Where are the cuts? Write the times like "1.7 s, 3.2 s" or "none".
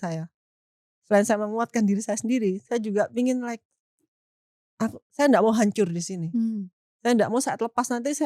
none